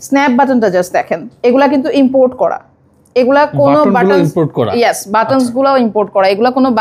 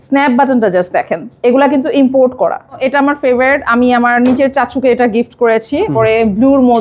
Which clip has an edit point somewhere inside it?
second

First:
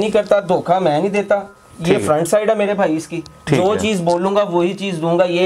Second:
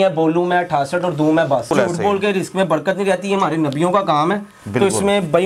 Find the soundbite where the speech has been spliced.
second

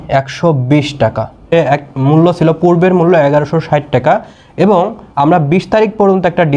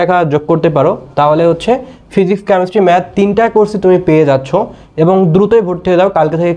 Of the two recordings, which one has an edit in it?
first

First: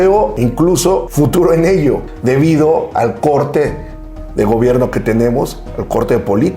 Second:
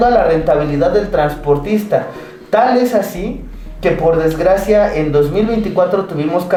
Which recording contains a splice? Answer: first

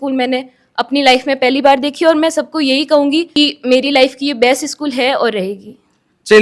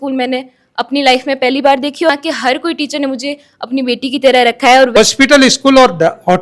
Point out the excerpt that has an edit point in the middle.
second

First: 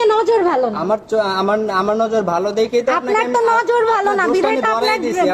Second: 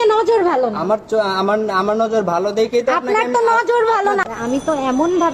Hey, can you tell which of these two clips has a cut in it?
second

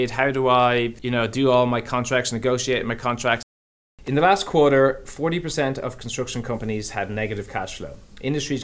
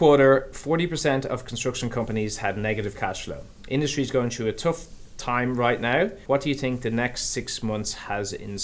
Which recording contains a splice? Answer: first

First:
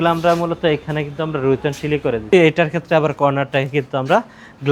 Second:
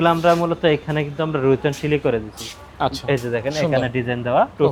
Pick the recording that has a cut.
first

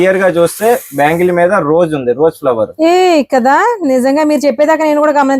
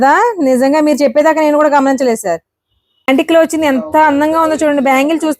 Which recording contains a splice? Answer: second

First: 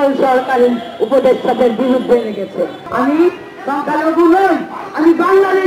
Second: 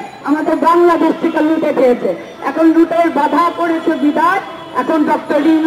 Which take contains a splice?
first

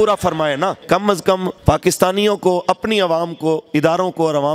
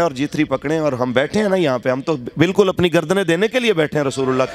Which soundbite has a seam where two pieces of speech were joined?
first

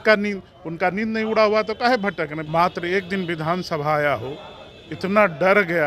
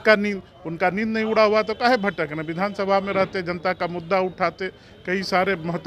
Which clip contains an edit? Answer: first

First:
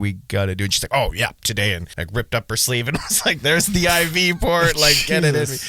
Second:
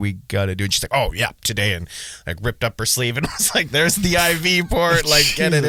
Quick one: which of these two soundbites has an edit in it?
first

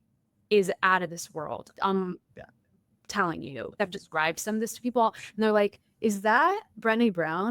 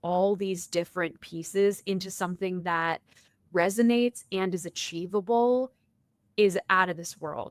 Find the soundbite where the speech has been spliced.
first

